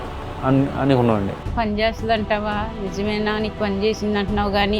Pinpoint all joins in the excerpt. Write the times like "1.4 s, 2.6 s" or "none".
1.4 s